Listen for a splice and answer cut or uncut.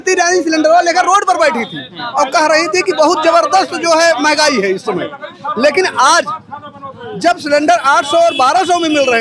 uncut